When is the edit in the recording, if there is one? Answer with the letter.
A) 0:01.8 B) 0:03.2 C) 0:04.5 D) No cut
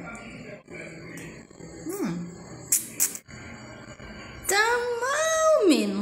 B